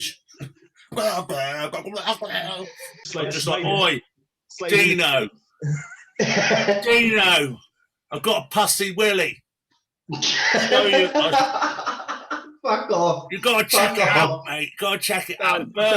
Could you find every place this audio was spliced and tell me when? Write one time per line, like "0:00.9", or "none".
0:03.0